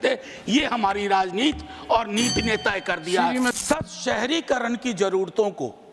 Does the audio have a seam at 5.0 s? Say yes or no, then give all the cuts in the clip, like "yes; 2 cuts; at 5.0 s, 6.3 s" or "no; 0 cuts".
no; 1 cut; at 3.5 s